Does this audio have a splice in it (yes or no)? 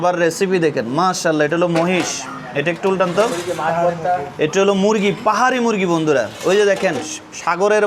no